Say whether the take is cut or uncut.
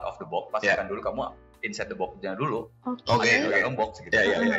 uncut